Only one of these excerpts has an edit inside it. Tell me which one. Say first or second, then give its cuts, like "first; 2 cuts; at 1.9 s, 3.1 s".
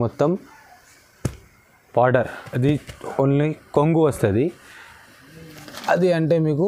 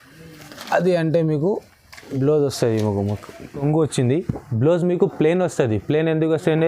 second; 1 cut; at 3.6 s